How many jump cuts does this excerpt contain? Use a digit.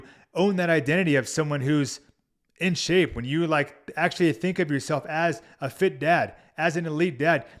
0